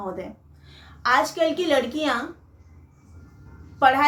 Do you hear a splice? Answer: no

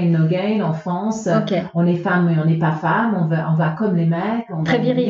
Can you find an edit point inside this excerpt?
no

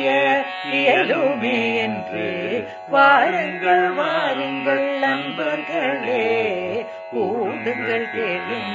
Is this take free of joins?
yes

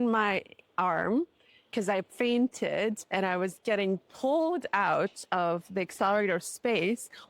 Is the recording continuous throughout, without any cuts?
yes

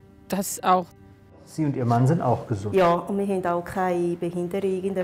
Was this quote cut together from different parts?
yes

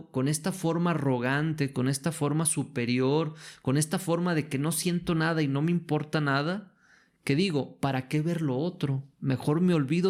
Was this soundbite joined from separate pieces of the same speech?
no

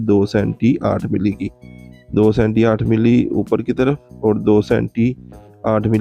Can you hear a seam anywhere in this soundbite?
no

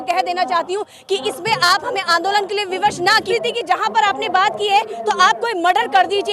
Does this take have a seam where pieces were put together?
yes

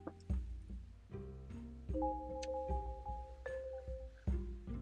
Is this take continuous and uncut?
yes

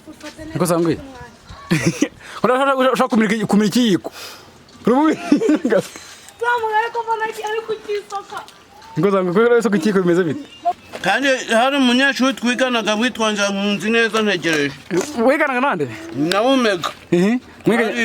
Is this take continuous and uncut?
no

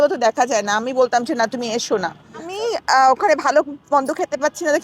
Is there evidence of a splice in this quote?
yes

